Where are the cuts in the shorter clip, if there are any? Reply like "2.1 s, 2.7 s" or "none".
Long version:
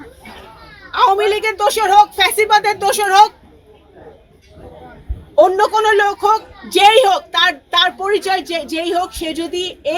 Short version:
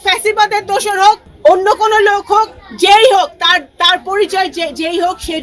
1.3 s